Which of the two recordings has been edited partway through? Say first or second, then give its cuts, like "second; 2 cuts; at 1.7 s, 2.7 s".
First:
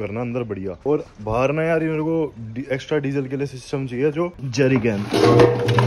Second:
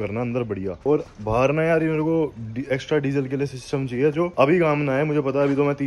first; 1 cut; at 4.4 s